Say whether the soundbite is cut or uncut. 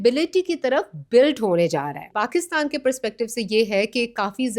cut